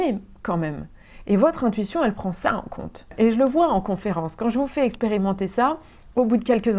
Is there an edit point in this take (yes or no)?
yes